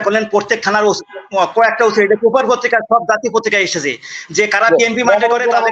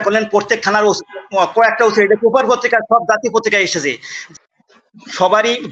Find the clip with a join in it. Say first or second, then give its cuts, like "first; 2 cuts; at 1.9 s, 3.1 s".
second; 1 cut; at 4.2 s